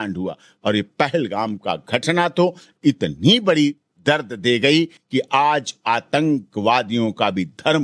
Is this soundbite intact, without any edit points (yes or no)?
yes